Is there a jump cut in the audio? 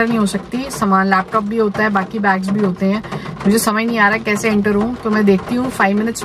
no; 0 cuts

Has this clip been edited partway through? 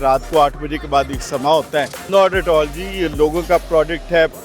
yes; 1 cut; at 2.0 s

